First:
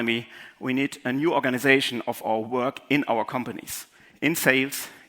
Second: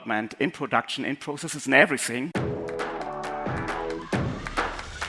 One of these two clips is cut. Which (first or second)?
second